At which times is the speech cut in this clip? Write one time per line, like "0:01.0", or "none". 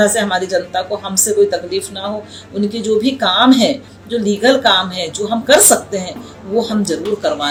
none